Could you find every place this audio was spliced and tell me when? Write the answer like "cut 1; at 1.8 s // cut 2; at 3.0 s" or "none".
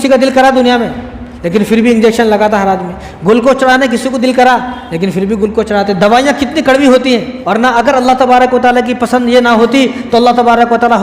cut 1; at 7.4 s

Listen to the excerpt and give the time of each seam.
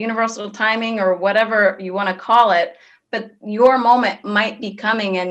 none

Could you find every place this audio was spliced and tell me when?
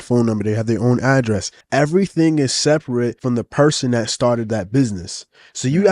cut 1; at 1.5 s // cut 2; at 3.2 s

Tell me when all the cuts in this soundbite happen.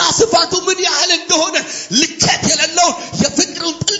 none

